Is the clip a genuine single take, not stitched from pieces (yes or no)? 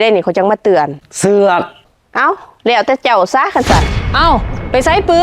no